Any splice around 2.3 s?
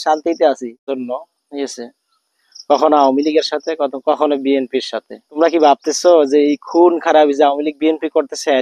no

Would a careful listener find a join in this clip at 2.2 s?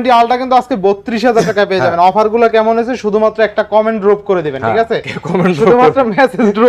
no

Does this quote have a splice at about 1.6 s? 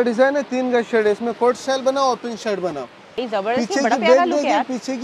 no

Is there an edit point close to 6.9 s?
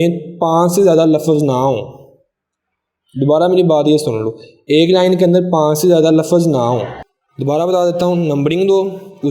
yes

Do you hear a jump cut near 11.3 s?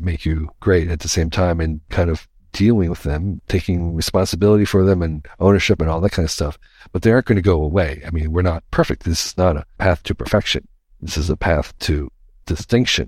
no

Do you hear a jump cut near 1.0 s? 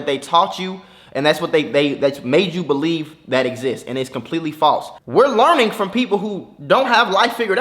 no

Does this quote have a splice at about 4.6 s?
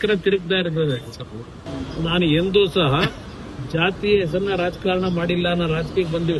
no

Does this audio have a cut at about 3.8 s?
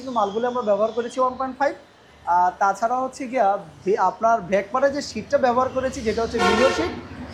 no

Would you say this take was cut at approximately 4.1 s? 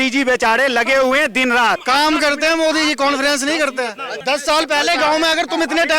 yes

